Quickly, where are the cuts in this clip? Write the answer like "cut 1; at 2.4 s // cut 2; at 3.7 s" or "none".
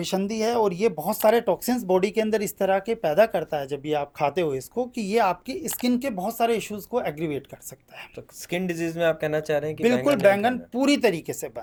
none